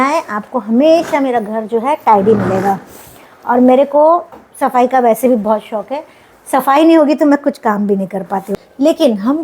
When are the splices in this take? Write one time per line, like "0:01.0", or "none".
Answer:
0:08.5